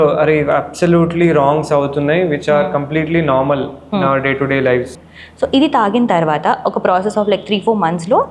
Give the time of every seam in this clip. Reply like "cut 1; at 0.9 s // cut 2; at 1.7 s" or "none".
cut 1; at 4.9 s